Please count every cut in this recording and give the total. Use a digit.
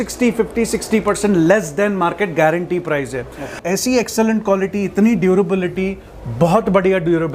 1